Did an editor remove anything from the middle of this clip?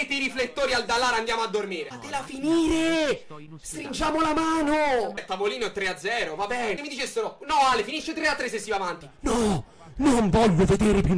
yes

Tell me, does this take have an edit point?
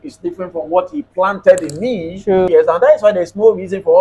yes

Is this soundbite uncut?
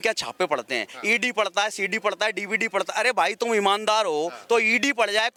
yes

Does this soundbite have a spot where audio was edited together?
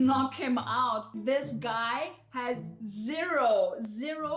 yes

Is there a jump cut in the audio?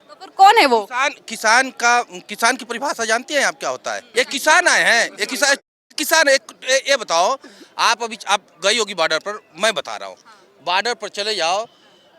yes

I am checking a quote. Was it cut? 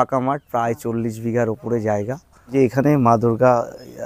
yes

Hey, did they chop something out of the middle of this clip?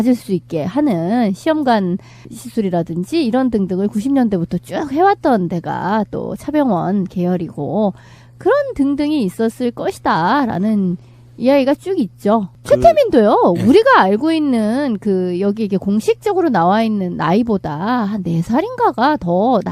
yes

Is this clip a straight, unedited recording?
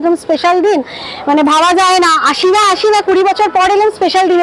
yes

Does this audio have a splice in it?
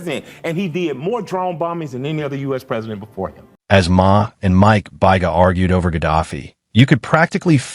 no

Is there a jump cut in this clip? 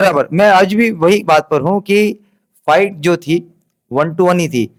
no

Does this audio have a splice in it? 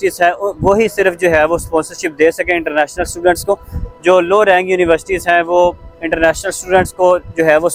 no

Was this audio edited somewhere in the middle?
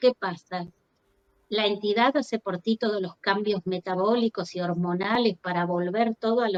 no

